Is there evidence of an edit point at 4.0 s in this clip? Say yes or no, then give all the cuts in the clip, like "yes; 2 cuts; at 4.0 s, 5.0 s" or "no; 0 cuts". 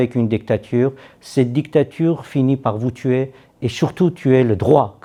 no; 0 cuts